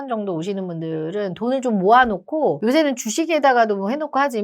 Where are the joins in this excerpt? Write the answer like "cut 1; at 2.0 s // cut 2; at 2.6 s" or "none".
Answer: none